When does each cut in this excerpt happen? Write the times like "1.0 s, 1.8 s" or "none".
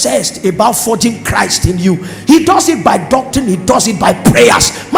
none